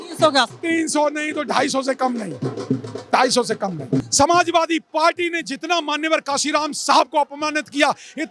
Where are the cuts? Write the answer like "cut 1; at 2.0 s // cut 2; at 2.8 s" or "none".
cut 1; at 4.1 s